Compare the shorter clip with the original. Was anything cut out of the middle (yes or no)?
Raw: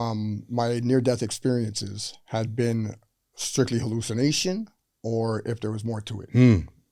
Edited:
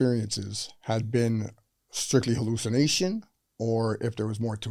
no